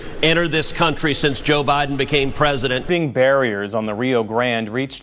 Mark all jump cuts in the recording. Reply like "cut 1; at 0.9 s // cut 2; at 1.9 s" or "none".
cut 1; at 2.8 s